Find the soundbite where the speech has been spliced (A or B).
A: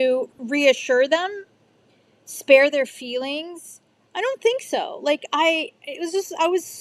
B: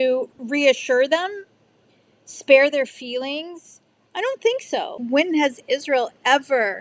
B